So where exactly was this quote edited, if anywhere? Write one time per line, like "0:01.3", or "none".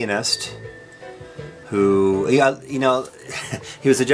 none